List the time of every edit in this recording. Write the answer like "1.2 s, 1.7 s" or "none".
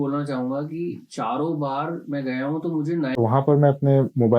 3.1 s